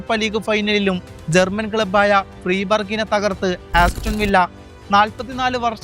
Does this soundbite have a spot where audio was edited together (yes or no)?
yes